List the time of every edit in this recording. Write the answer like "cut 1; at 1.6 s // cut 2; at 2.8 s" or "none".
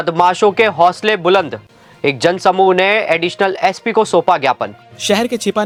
none

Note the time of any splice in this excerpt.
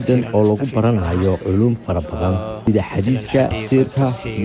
cut 1; at 1.4 s // cut 2; at 2.6 s // cut 3; at 3.6 s

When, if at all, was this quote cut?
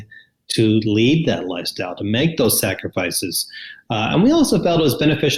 none

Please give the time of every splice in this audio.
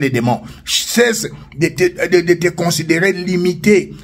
none

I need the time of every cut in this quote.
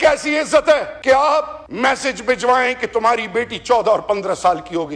cut 1; at 0.9 s // cut 2; at 1.6 s

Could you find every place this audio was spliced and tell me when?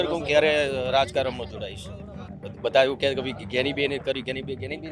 cut 1; at 2.3 s

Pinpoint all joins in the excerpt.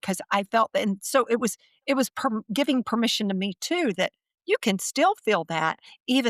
none

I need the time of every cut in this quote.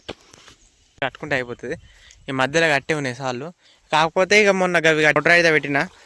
cut 1; at 1.0 s // cut 2; at 5.2 s

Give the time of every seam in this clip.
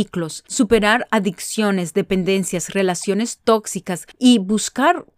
cut 1; at 4.0 s

